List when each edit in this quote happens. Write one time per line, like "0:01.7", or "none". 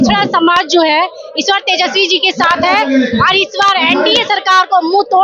none

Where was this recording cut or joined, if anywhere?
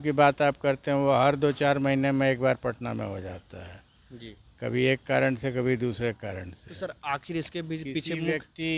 none

